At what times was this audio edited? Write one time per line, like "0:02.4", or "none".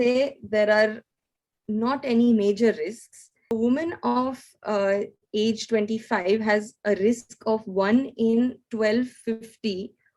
0:03.5